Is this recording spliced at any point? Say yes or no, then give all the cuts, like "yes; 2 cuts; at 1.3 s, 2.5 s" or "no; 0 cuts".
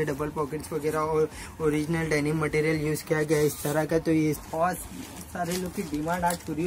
yes; 1 cut; at 4.4 s